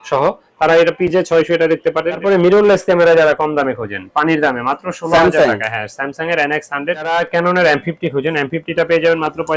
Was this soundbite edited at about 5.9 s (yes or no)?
no